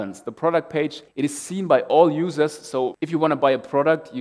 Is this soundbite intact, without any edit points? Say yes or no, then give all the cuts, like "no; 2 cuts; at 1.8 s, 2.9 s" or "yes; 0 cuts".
no; 2 cuts; at 1.0 s, 3.0 s